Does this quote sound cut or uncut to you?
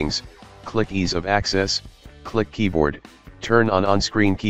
uncut